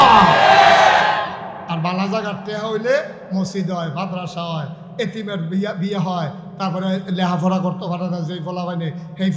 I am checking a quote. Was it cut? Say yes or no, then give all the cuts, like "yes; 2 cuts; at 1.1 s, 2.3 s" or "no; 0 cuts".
no; 0 cuts